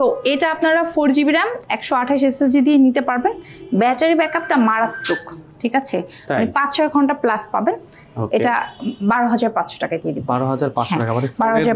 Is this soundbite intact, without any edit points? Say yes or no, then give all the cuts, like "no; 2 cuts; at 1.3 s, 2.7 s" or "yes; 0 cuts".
yes; 0 cuts